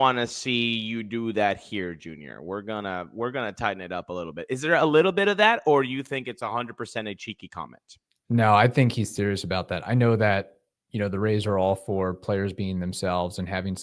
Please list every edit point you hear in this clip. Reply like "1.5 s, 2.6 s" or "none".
none

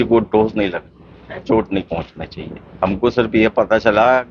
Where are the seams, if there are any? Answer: 2.7 s

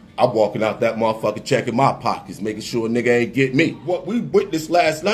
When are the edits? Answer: 4.2 s

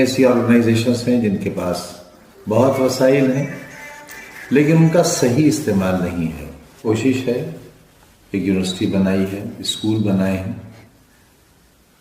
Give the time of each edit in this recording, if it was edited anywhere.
6.8 s

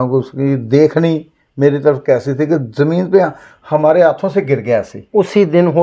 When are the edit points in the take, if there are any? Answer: none

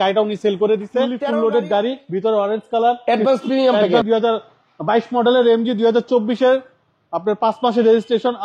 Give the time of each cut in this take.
1.3 s, 4.1 s

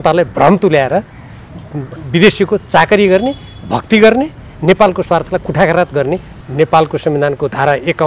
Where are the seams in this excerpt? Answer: 6.3 s

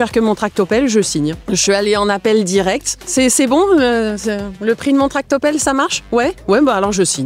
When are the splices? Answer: 1.4 s, 2.9 s

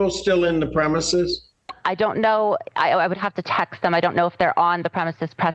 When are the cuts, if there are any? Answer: none

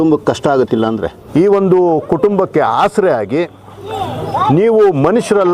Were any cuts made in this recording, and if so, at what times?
1.2 s

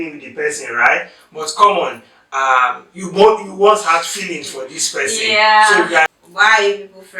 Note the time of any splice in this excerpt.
6.1 s

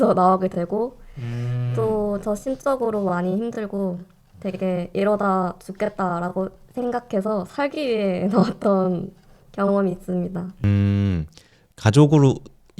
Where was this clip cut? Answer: none

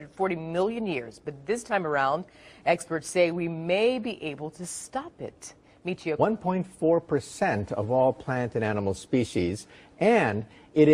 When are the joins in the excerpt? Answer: none

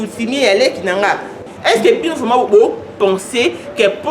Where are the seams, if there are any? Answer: 1.4 s

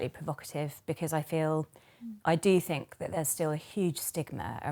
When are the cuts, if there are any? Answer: none

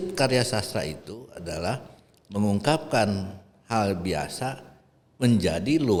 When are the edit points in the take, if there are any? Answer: none

